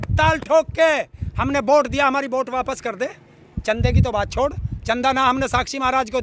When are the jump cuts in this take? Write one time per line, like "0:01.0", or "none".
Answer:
none